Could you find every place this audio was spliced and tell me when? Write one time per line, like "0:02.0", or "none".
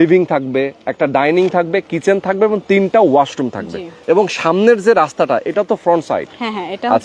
0:03.9

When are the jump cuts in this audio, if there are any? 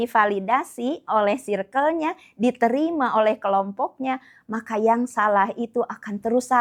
none

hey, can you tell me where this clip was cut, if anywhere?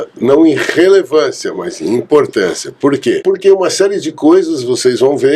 0:03.2

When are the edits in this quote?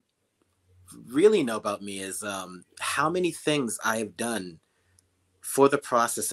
none

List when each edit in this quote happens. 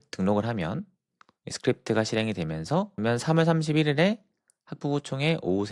0:03.0

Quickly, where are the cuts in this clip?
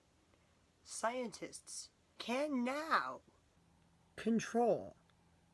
0:02.2

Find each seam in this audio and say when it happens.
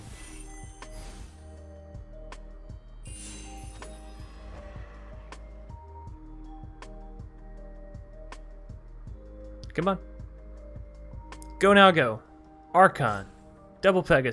none

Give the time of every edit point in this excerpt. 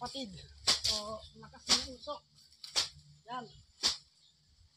none

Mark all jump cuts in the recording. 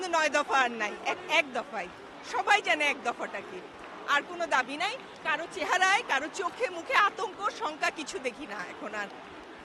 none

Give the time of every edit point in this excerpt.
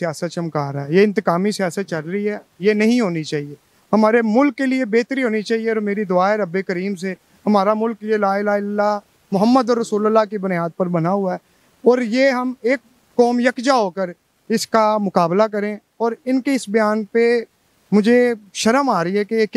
none

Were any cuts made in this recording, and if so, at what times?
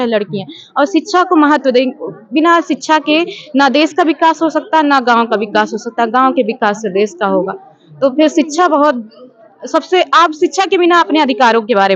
none

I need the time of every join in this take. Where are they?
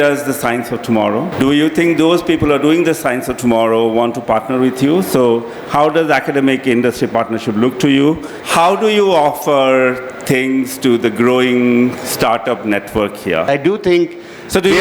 0:01.3
0:08.3
0:13.5

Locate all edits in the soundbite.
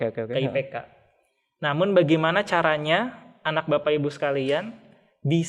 none

